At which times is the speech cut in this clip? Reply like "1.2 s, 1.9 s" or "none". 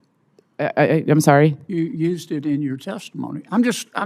none